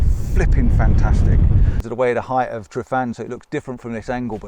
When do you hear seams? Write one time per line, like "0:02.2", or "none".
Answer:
0:01.9